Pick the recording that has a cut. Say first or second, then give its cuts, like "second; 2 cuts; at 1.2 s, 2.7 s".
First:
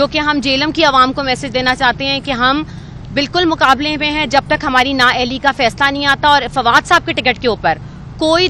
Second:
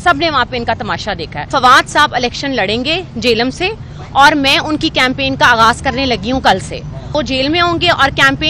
second; 2 cuts; at 1.5 s, 7.1 s